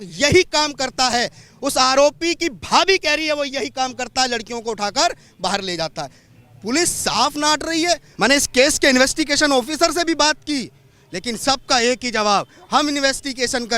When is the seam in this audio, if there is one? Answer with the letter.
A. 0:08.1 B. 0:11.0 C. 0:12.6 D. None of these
A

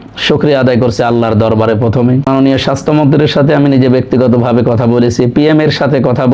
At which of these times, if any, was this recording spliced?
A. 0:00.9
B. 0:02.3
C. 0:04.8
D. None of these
B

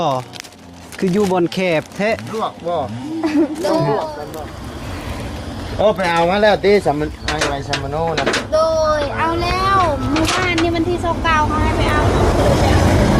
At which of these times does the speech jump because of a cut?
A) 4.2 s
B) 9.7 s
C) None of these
A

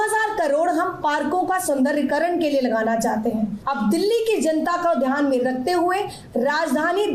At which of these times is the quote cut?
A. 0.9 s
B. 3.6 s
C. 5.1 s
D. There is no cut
B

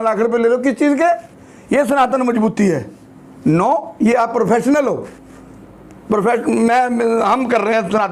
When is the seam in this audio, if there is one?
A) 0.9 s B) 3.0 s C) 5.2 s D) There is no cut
D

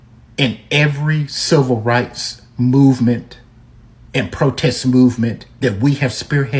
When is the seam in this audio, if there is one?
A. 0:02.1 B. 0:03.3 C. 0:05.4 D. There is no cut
D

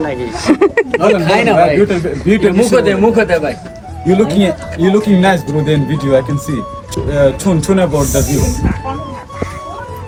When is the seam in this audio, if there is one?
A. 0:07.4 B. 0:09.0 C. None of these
C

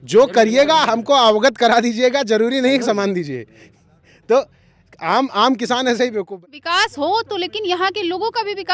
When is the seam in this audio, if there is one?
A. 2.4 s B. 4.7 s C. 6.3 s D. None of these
C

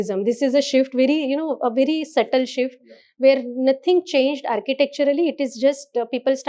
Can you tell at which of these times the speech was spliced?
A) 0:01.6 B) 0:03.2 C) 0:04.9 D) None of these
D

